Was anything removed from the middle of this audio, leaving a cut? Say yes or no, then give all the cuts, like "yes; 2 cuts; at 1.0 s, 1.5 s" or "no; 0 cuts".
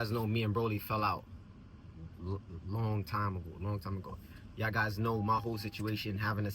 no; 0 cuts